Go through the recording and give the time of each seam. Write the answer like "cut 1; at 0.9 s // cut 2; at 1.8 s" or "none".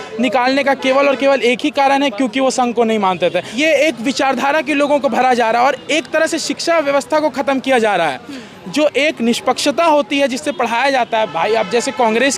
cut 1; at 3.5 s

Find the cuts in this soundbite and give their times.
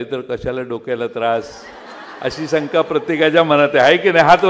none

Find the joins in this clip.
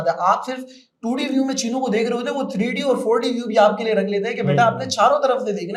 none

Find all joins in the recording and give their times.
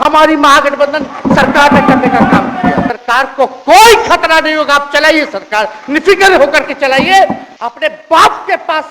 cut 1; at 2.9 s // cut 2; at 7.4 s

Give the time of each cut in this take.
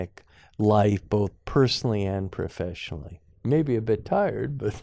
none

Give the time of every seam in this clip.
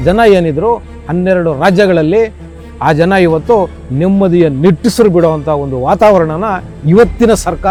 none

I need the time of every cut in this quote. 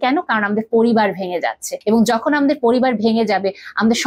cut 1; at 1.7 s

